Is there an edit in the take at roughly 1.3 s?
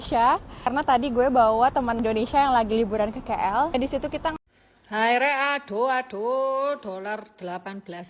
no; 1 cut; at 4.3 s

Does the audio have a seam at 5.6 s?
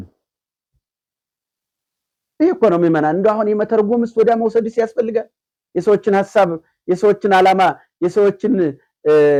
no; 0 cuts

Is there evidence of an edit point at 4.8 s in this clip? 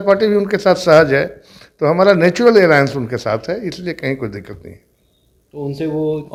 no; 0 cuts

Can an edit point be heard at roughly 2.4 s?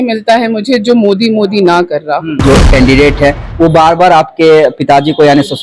yes; 1 cut; at 2.4 s

